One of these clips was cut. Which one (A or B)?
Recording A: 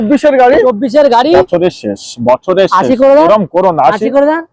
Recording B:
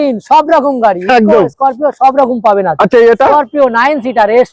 A